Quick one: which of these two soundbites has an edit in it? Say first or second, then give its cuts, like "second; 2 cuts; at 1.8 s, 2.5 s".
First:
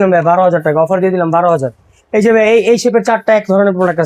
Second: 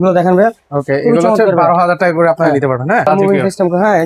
second; 1 cut; at 3.1 s